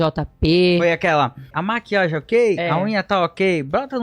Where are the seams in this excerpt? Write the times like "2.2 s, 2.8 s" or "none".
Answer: 1.6 s